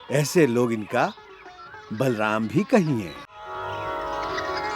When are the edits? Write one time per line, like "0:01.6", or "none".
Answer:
0:03.5